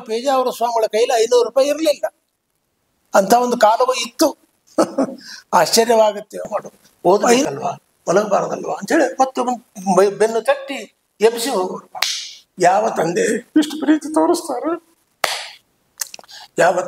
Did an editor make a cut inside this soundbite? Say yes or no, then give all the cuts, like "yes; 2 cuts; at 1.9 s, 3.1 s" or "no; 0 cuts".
yes; 1 cut; at 6.5 s